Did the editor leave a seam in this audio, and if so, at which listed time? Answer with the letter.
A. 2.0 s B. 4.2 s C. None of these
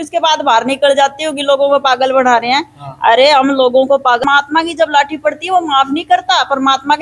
B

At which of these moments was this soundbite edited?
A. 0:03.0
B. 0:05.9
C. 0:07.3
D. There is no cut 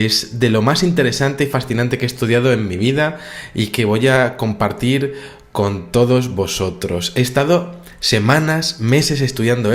C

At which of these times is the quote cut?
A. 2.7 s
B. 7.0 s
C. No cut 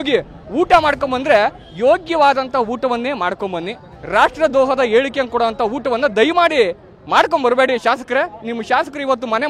C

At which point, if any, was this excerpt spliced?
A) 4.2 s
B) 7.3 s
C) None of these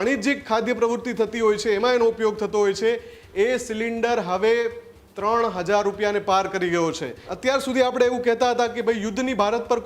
B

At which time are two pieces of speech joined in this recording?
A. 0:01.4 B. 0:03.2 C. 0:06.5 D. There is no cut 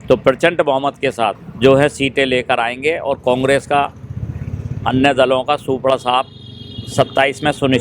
A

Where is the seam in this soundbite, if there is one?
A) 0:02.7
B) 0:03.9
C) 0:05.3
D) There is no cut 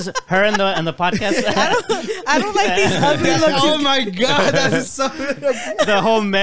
D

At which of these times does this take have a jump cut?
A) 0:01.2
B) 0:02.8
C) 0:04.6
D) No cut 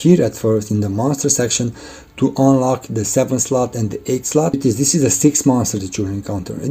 C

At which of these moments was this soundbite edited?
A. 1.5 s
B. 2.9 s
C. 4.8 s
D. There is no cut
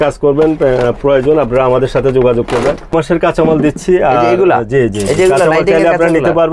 B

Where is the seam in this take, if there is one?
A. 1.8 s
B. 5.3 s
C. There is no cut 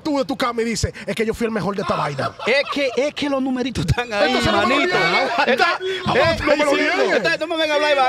C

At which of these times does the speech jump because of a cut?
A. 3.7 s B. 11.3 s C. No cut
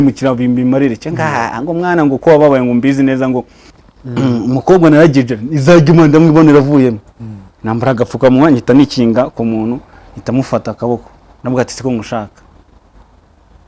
A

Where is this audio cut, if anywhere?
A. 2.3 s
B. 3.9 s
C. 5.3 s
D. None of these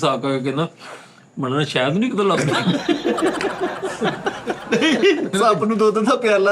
C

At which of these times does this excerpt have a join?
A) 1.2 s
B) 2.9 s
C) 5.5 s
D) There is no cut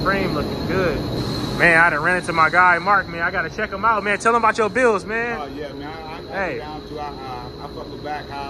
A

